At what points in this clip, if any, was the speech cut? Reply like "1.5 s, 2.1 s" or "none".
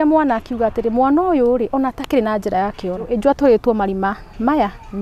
3.1 s